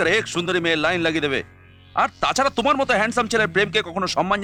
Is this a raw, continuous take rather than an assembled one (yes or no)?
yes